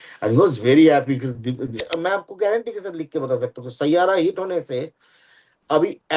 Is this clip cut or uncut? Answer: cut